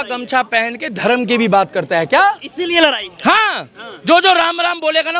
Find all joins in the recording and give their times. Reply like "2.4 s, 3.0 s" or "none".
none